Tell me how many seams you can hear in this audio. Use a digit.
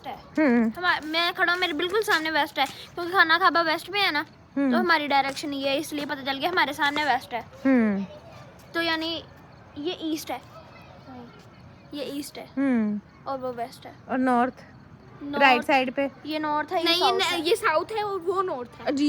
0